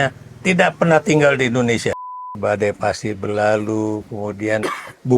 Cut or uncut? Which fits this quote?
cut